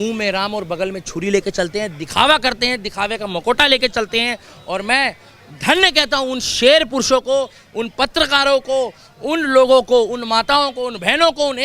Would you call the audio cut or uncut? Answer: uncut